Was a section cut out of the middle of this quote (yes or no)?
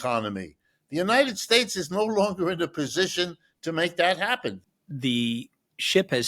yes